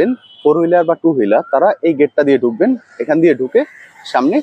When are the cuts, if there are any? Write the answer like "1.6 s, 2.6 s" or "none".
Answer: none